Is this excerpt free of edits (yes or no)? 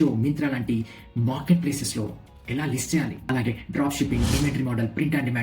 no